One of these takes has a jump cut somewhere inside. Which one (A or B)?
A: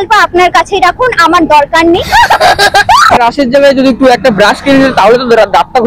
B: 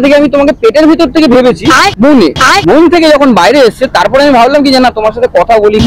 A